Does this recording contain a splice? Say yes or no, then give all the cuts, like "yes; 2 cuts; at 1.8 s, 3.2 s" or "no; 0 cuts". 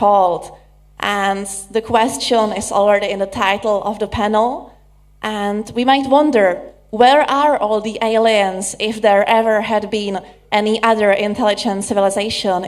yes; 1 cut; at 10.3 s